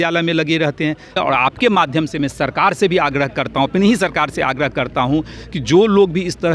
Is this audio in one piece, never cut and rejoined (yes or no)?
no